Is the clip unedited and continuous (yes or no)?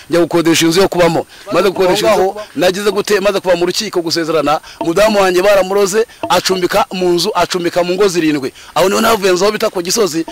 no